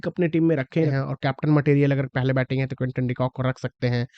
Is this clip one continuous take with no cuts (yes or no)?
no